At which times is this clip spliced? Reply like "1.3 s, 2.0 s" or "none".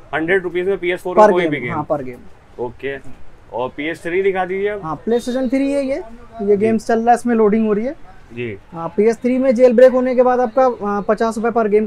none